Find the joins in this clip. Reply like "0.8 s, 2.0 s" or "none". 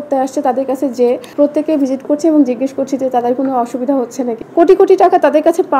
1.3 s, 4.4 s